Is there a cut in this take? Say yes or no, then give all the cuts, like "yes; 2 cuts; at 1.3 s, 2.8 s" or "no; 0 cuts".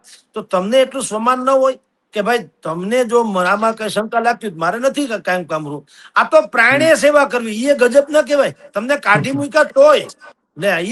no; 0 cuts